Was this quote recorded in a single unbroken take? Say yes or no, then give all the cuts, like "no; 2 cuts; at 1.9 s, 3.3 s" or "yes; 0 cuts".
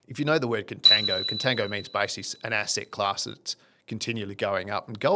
yes; 0 cuts